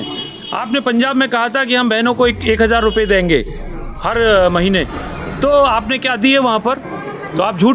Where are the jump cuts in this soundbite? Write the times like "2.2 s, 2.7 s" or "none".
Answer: none